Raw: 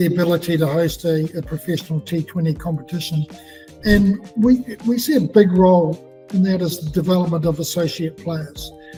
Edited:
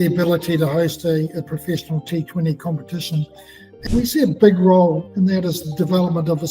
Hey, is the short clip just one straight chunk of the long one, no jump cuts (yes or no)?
no